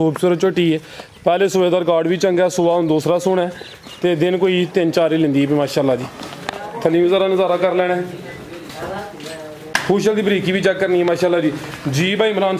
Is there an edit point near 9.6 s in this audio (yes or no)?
yes